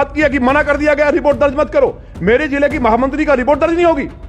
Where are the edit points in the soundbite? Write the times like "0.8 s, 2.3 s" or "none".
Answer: none

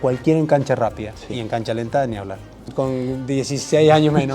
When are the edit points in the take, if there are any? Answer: 2.7 s

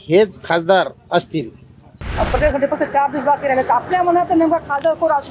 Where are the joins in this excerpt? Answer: 2.0 s

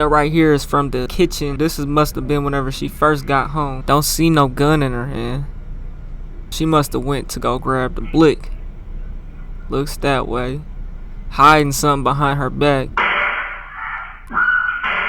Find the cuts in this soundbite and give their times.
1.3 s, 3.8 s, 6.5 s, 12.9 s, 14.1 s

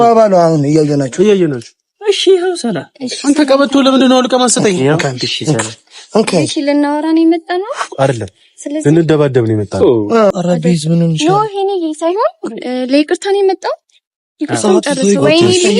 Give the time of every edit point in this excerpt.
10.4 s

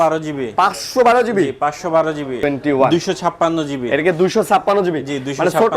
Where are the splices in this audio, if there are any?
2.4 s

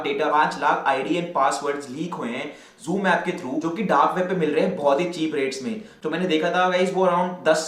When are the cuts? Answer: 5.9 s

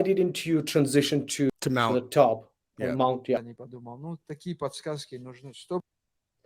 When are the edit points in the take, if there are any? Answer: 1.5 s, 3.4 s

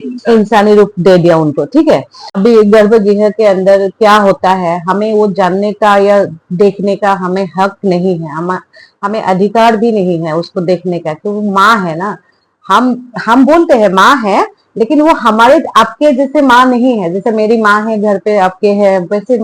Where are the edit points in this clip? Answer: 2.2 s

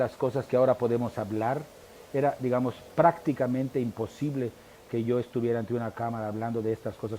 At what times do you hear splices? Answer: none

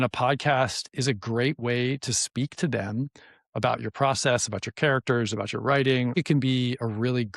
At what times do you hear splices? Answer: 6.1 s

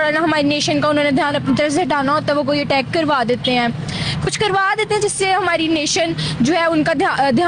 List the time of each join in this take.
none

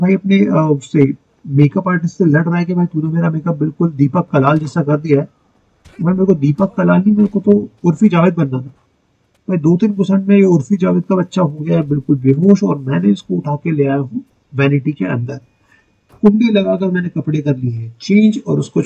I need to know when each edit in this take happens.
none

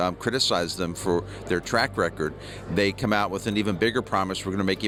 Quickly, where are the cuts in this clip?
none

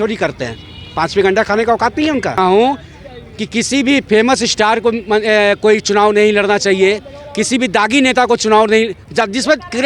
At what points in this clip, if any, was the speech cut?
2.4 s

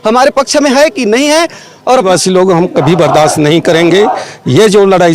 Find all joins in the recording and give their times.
2.1 s

